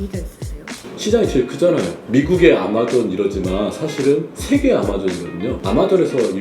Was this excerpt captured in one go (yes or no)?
no